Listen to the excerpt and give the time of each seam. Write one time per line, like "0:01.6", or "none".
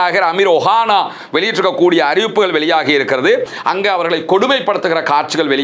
0:03.4